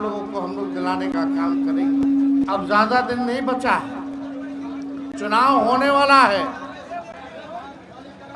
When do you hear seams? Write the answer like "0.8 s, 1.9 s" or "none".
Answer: none